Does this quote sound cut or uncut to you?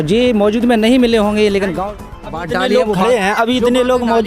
cut